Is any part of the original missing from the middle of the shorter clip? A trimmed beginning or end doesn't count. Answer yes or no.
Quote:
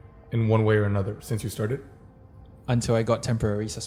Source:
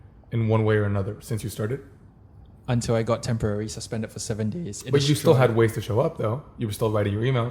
no